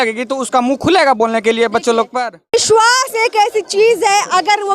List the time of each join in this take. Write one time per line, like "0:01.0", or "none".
0:02.5